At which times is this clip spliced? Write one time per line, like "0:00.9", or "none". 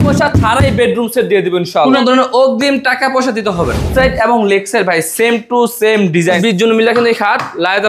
0:01.8
0:03.9
0:06.4